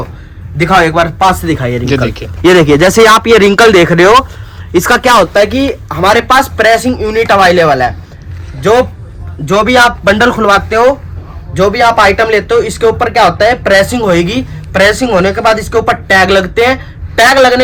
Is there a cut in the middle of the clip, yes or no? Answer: no